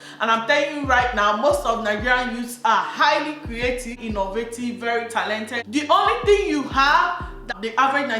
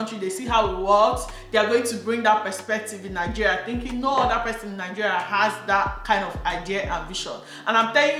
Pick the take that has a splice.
first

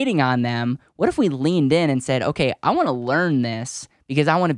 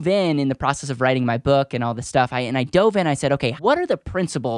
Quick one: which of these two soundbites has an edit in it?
second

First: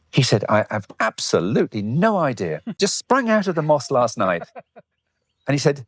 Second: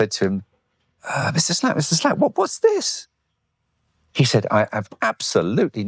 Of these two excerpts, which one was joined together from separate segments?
first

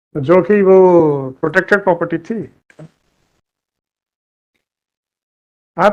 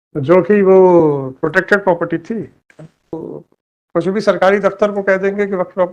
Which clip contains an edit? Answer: second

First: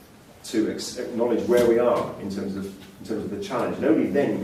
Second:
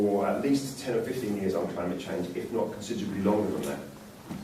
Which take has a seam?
second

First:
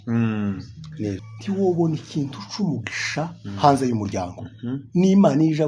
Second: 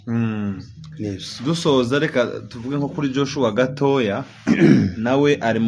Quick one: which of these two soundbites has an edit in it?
first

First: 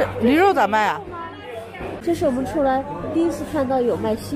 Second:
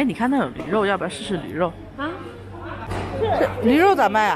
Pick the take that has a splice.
first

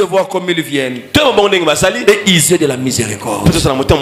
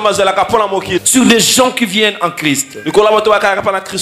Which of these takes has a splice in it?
second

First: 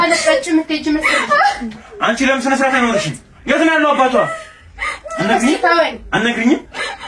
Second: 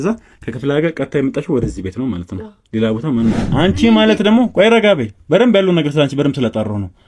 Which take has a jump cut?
second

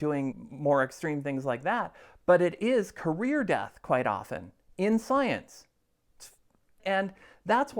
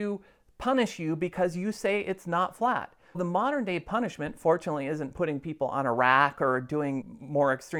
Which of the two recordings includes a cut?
first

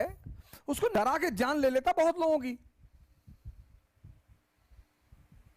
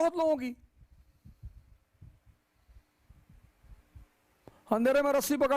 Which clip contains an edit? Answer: first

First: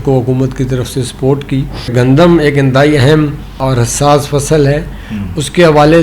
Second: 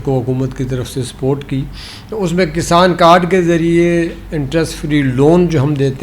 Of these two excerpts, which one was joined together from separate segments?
first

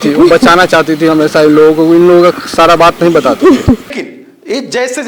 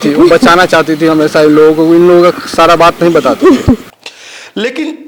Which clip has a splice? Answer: first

